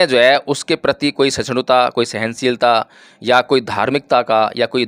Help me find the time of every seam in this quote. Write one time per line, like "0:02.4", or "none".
none